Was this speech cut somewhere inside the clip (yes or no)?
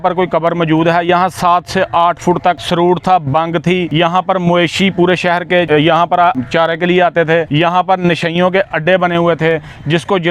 yes